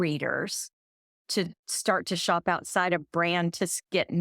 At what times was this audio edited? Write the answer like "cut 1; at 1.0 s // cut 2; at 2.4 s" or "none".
cut 1; at 1.2 s